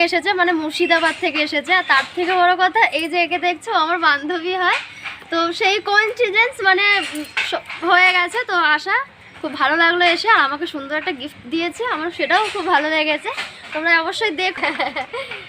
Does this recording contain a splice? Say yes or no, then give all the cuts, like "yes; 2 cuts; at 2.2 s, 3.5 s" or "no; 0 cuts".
yes; 1 cut; at 14.6 s